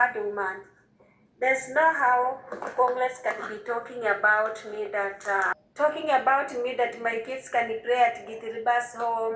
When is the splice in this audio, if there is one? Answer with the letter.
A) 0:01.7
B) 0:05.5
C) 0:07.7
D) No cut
B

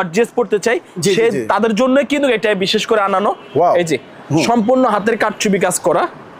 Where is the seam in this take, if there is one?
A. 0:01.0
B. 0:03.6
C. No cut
C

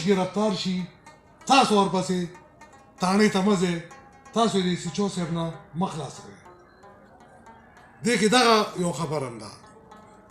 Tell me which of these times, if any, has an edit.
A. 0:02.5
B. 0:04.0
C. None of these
C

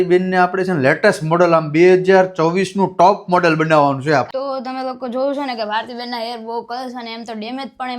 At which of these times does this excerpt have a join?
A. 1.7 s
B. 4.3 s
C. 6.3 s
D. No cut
B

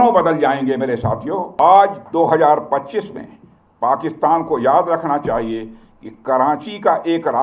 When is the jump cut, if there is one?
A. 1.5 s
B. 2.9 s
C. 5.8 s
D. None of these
A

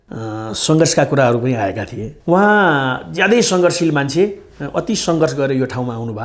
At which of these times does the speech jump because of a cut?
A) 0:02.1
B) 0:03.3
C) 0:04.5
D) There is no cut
A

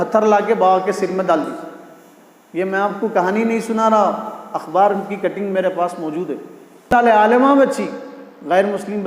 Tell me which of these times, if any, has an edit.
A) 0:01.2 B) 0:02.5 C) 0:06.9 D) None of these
C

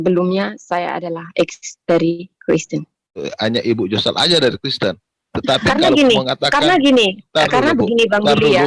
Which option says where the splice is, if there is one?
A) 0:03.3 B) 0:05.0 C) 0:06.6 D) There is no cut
A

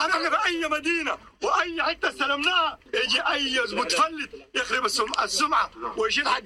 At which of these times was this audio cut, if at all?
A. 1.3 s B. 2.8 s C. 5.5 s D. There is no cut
A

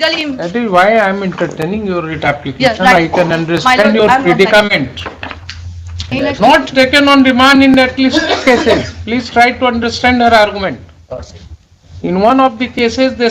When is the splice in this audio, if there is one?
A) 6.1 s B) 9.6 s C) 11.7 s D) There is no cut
A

